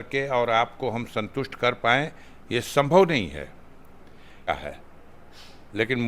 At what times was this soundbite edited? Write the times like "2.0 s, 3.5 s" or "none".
4.5 s